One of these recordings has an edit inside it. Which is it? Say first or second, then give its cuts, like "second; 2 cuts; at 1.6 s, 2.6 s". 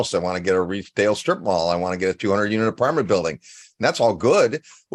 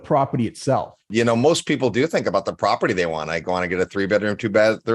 second; 1 cut; at 1.0 s